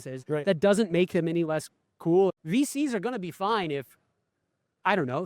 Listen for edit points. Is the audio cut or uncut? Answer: cut